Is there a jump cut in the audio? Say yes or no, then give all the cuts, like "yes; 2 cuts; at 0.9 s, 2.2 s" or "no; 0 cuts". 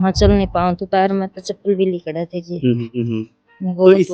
yes; 1 cut; at 3.1 s